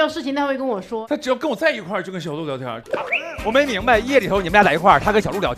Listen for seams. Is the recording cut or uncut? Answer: cut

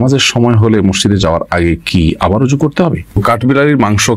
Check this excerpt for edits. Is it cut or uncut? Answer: cut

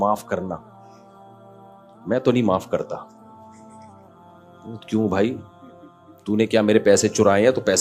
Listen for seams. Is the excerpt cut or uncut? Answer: uncut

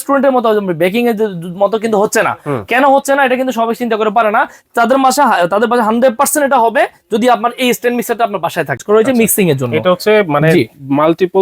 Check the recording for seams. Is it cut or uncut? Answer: cut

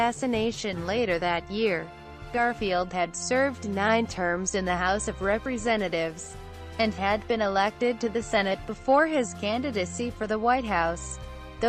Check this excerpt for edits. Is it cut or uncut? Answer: uncut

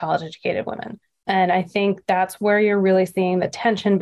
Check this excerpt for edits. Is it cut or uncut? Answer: uncut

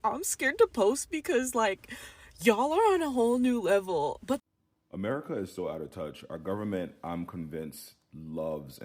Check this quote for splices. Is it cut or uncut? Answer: cut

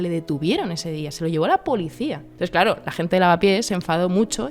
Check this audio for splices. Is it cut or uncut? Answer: cut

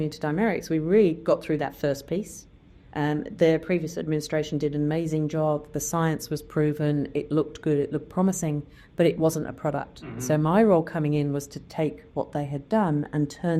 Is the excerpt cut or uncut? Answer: uncut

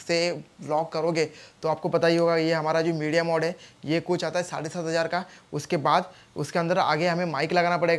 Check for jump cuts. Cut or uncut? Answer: uncut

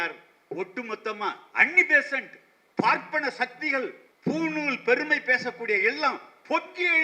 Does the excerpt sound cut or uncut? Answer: cut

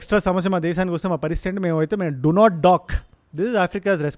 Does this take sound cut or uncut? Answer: uncut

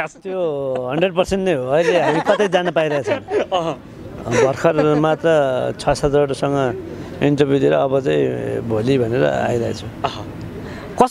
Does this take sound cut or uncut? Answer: uncut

